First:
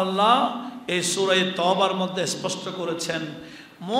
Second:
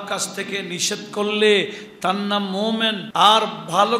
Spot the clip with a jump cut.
second; 1 cut; at 3.0 s

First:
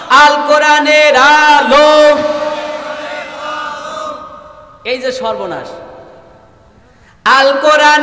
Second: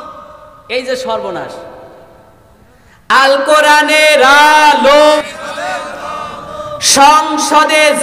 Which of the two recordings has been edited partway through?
second; 1 cut; at 5.2 s

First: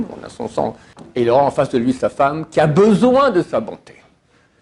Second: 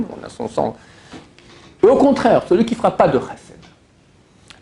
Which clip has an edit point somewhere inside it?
first; 1 cut; at 0.9 s

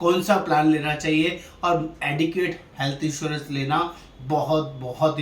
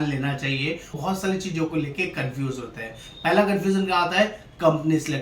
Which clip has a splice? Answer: second; 1 cut; at 1.0 s

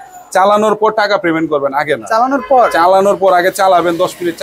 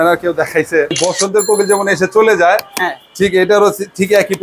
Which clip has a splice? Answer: second; 1 cut; at 1.0 s

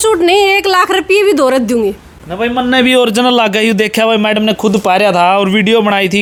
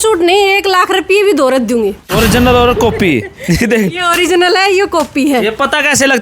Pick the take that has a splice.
second; 1 cut; at 2.1 s

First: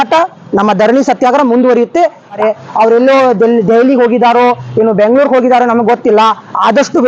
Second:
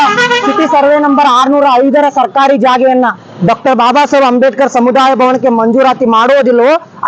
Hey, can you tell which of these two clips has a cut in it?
first; 1 cut; at 2.4 s

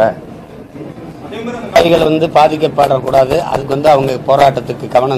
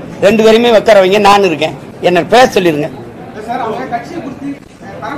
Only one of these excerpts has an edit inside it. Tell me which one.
first; 1 cut; at 1.8 s

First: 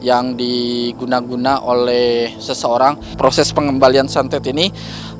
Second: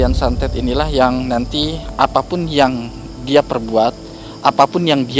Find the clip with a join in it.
first; 1 cut; at 3.1 s

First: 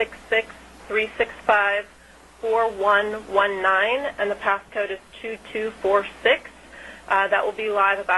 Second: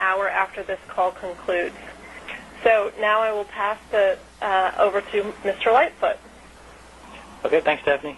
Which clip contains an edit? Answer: first; 1 cut; at 4.5 s

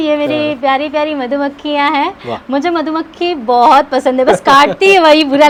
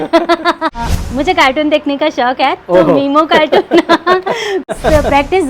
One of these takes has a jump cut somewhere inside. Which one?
second; 2 cuts; at 0.9 s, 4.7 s

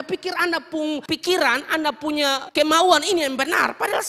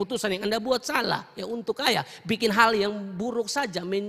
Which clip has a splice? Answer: first; 2 cuts; at 1.0 s, 2.4 s

